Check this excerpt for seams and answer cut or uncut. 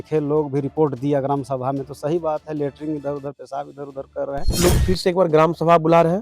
cut